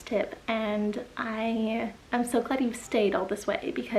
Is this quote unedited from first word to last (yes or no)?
no